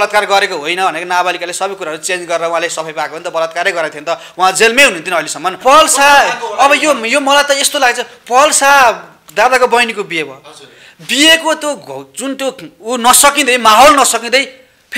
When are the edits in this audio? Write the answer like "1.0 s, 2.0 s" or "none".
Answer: 5.5 s